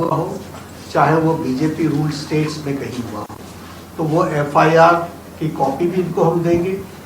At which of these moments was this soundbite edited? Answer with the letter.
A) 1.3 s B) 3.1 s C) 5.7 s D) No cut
D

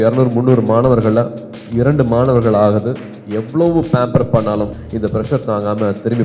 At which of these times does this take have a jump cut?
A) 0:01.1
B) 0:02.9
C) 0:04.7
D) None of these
C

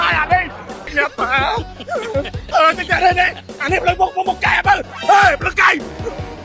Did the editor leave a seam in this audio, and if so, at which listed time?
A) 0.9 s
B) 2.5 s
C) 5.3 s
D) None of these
A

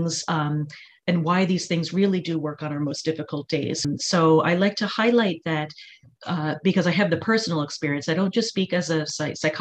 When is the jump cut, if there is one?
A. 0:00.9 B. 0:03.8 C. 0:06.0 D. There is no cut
B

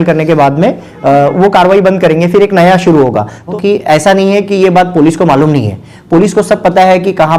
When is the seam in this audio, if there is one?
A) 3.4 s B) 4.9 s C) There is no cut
A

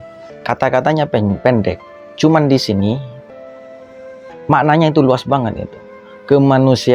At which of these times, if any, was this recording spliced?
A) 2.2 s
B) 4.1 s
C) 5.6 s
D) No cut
D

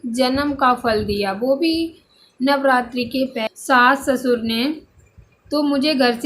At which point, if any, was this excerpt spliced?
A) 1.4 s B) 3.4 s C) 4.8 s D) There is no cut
B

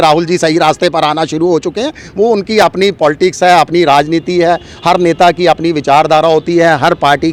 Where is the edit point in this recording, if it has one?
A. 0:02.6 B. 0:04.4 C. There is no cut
C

